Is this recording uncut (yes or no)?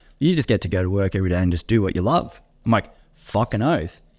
yes